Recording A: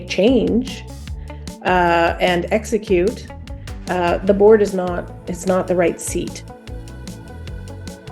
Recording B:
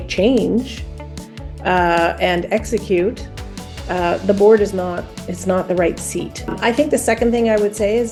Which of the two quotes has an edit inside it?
A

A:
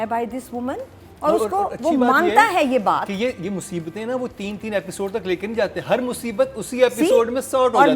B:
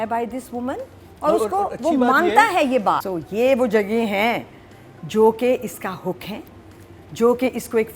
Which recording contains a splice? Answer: B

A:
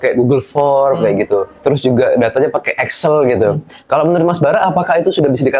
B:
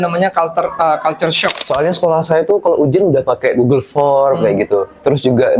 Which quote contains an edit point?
B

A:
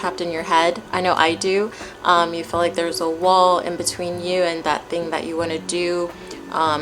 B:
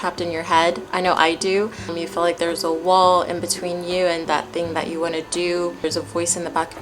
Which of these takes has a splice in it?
B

